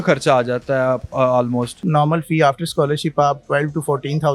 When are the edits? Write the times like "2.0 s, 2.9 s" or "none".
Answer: 1.8 s